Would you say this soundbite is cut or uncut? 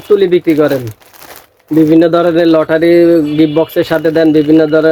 uncut